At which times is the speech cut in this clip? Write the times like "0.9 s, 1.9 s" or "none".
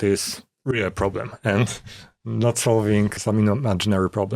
3.1 s